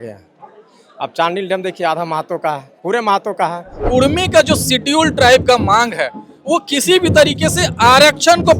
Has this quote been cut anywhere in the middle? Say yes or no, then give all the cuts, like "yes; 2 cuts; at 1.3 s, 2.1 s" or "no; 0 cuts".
yes; 1 cut; at 3.8 s